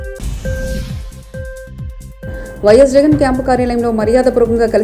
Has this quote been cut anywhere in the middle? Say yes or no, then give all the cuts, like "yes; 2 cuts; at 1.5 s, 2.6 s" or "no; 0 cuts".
no; 0 cuts